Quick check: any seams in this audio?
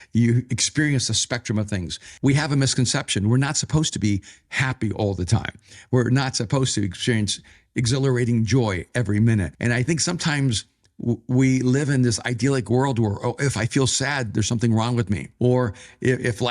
yes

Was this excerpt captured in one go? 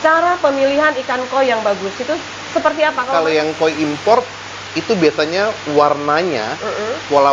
no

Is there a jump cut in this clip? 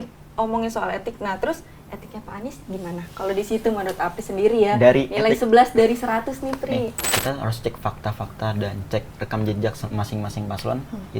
yes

